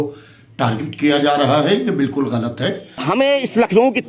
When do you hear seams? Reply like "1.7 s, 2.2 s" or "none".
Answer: 2.9 s